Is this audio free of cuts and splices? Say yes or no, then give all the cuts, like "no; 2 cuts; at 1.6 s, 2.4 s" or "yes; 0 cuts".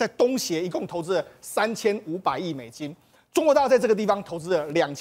yes; 0 cuts